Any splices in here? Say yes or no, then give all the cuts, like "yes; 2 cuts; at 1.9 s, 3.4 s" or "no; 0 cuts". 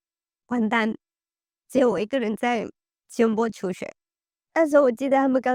no; 0 cuts